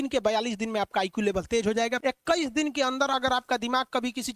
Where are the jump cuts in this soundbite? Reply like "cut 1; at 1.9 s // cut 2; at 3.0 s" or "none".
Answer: cut 1; at 2.0 s